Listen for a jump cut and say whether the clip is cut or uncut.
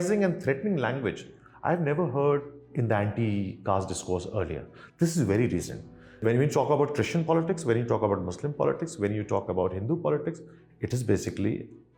cut